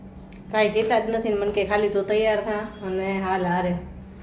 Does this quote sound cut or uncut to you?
uncut